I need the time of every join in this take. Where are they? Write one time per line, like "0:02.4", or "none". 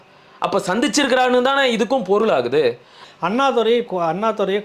0:02.9
0:03.9